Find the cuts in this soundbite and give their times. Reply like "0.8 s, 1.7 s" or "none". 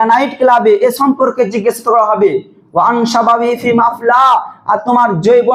none